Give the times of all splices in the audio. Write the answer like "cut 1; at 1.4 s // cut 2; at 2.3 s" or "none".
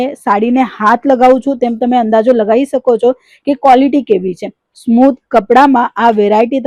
none

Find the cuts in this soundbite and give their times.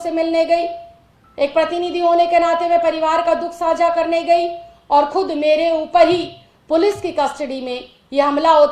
none

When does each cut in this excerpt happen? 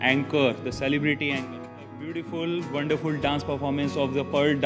cut 1; at 1.4 s

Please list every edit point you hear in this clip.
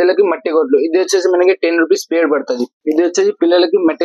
cut 1; at 2.8 s

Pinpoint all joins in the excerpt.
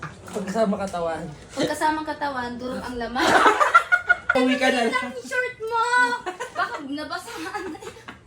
cut 1; at 4.3 s

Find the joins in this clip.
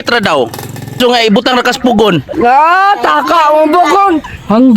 cut 1; at 1.0 s

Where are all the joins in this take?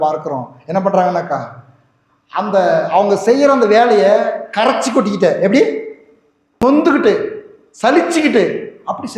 cut 1; at 6.6 s

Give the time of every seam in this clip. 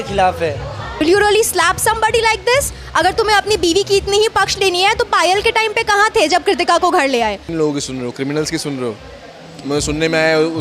cut 1; at 0.9 s // cut 2; at 7.4 s

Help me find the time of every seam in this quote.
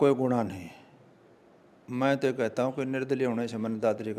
none

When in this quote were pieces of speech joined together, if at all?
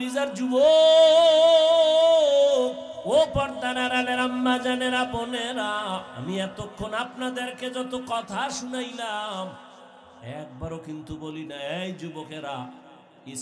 cut 1; at 2.9 s // cut 2; at 6.1 s

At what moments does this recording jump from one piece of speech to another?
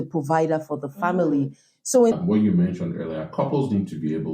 cut 1; at 2.1 s

